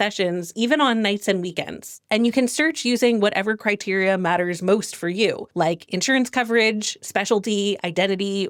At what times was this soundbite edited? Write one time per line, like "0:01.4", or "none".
none